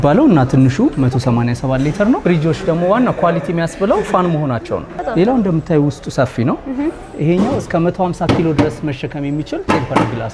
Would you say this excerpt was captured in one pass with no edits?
no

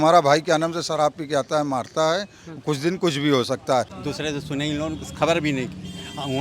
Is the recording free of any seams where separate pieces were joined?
no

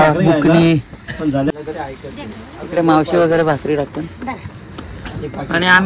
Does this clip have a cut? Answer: yes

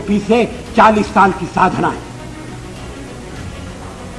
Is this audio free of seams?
yes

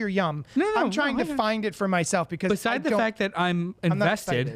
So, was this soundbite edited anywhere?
no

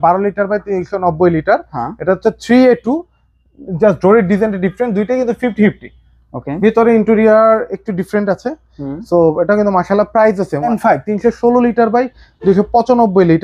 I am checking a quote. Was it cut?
yes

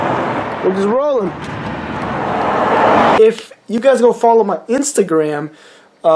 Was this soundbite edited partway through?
yes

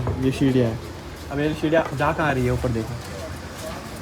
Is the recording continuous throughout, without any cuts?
yes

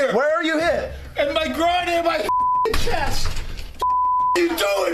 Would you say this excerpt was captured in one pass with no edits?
yes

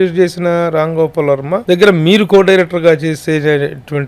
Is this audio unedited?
no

